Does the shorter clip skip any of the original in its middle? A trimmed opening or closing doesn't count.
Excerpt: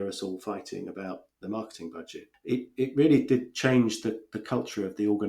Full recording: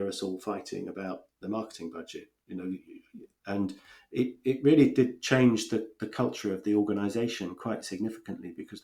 yes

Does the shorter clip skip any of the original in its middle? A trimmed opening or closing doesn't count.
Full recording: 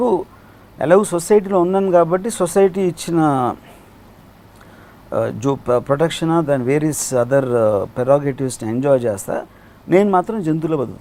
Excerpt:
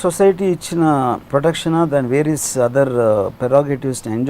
yes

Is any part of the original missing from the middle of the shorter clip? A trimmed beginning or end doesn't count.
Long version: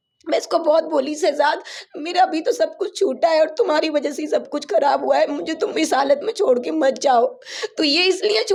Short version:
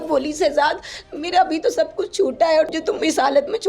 yes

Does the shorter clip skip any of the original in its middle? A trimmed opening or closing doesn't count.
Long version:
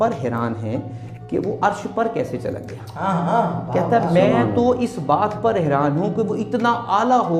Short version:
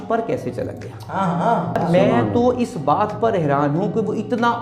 yes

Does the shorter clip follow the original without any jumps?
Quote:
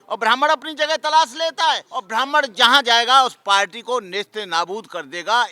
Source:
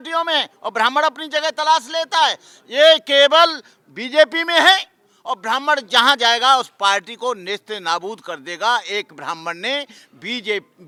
no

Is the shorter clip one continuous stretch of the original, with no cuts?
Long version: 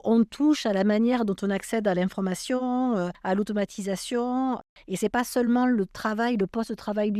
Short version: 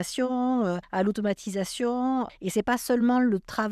no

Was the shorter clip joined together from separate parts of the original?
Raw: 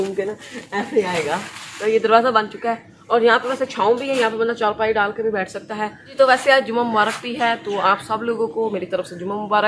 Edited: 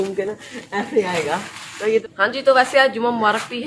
yes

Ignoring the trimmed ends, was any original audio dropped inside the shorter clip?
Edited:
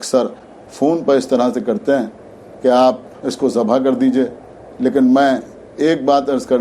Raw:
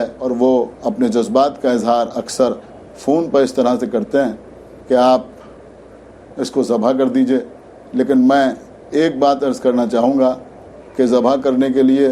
yes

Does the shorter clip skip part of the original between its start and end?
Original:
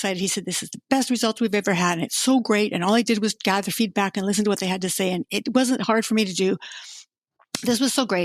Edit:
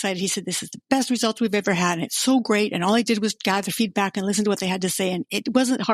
no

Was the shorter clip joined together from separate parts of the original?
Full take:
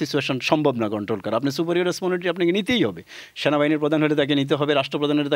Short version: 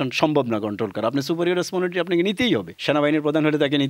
yes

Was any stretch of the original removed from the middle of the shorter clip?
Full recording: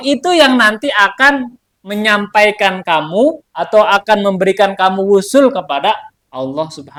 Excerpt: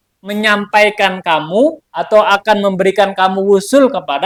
no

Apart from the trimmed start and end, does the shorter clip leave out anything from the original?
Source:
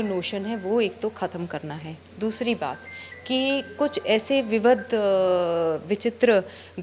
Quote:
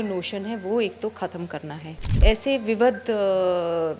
yes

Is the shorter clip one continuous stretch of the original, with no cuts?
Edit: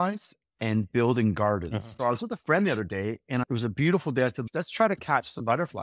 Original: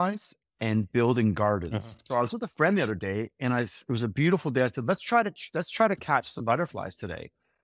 no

